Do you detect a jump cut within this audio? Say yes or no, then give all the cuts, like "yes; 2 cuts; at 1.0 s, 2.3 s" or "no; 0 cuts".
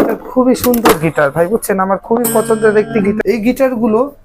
yes; 1 cut; at 3.2 s